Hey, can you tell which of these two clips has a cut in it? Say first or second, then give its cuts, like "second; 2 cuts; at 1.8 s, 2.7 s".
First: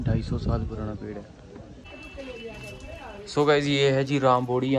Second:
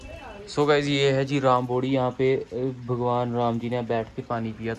first; 1 cut; at 1.8 s